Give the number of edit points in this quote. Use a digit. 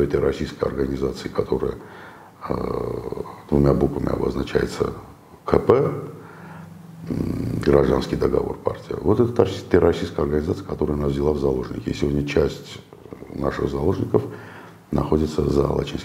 0